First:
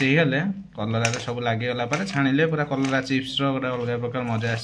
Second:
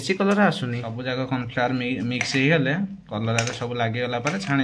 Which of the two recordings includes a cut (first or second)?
second